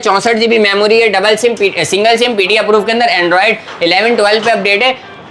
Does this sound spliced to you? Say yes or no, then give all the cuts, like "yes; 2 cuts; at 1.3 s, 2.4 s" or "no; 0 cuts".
no; 0 cuts